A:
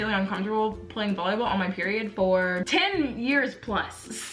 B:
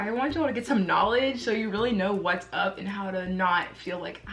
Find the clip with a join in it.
A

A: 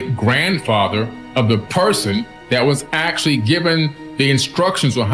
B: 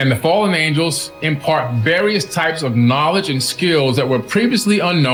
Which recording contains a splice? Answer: A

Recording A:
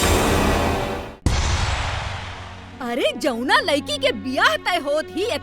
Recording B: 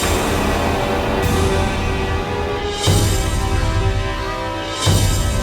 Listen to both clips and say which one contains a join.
A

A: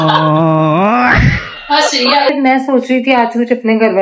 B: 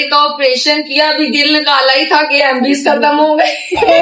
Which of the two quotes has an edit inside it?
A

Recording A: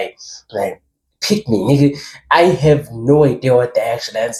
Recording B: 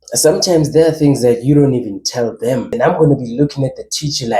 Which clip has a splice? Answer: B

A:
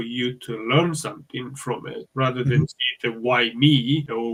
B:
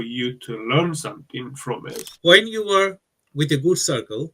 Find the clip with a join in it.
B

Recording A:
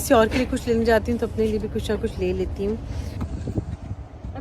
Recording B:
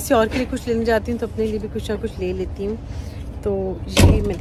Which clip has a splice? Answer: A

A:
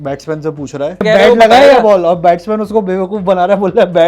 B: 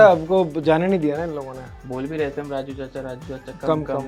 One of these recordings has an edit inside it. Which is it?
A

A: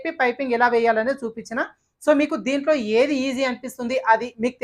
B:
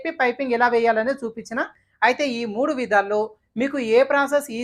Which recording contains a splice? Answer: B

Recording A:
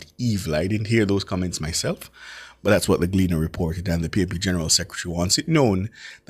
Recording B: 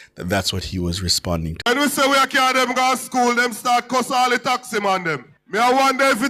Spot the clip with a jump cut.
B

